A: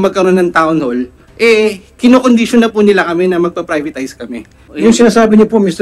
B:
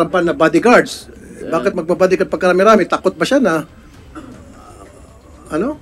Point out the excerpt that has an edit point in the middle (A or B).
A